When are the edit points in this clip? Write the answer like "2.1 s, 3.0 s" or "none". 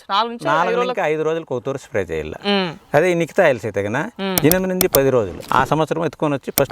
5.4 s